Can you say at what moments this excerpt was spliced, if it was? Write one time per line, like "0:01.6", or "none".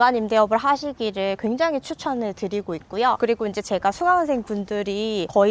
none